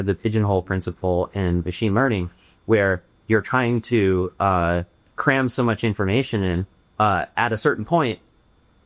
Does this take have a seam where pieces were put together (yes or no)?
no